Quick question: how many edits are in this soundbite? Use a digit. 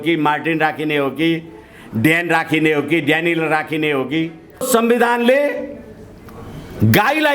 1